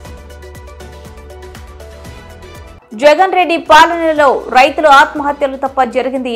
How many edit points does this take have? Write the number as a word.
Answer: one